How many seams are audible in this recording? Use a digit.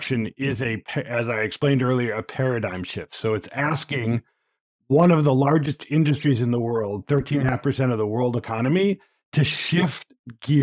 0